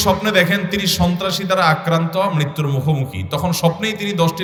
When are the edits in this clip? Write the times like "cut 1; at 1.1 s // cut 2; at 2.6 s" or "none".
none